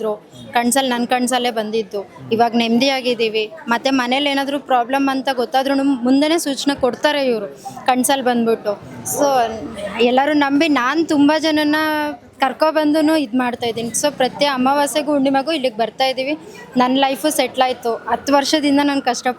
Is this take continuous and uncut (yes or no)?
yes